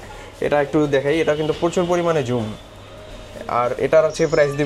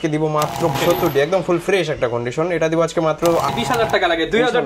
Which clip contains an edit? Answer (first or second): second